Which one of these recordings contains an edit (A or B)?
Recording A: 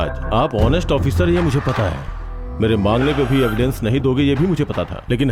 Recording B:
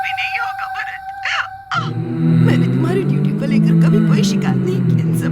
B